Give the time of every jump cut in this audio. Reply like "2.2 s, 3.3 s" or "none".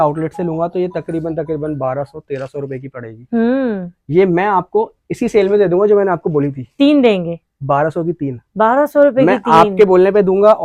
none